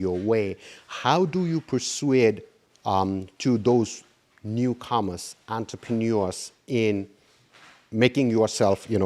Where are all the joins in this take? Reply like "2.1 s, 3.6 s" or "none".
none